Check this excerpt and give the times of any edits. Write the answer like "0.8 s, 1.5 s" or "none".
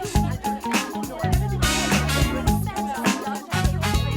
none